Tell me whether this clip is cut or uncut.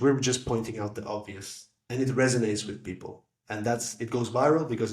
uncut